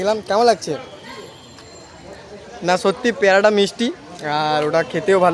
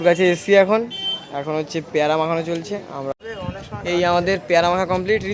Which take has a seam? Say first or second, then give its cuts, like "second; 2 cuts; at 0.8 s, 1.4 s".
second; 1 cut; at 3.1 s